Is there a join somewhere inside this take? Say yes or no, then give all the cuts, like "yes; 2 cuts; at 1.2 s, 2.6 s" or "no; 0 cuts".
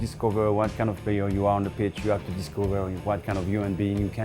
no; 0 cuts